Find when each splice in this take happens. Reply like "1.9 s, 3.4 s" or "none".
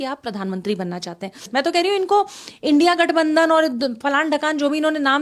1.5 s